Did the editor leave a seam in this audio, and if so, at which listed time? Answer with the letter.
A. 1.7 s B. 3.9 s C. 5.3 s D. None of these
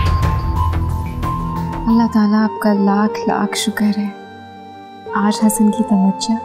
A